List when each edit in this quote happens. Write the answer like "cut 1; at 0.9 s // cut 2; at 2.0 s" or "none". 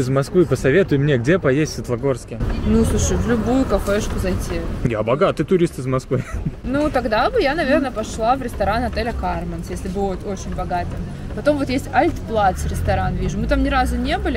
none